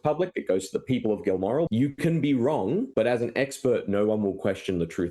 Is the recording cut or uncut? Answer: cut